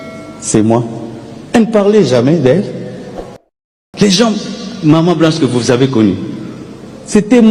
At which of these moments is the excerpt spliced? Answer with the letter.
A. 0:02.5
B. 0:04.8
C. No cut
C